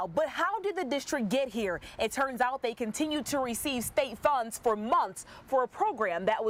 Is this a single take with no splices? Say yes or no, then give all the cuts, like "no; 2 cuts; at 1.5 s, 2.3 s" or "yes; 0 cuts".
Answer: yes; 0 cuts